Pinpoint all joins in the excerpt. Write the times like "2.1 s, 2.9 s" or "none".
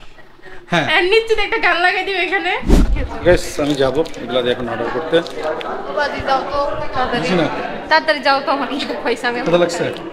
2.8 s